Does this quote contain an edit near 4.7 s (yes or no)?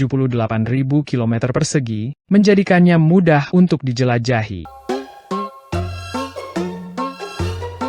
yes